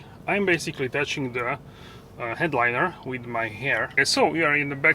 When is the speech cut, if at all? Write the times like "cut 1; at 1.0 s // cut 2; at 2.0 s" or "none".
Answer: cut 1; at 3.9 s